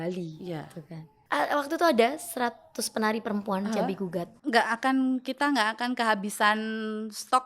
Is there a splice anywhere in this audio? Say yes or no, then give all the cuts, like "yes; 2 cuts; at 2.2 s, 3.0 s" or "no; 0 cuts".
yes; 2 cuts; at 1.1 s, 4.3 s